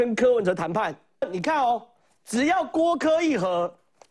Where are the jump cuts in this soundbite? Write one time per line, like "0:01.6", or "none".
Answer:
0:01.2